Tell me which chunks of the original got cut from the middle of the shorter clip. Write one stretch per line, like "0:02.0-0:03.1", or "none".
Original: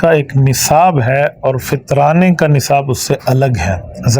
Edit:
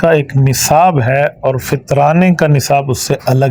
none